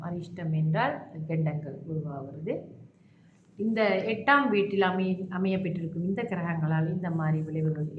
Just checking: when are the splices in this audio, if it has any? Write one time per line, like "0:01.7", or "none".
none